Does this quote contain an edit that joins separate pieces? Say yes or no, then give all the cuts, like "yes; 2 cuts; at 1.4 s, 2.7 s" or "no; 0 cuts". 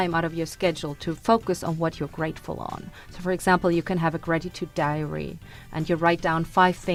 no; 0 cuts